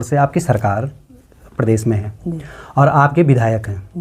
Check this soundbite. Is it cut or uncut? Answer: uncut